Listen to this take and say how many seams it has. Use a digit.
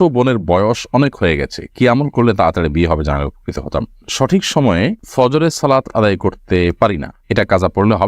1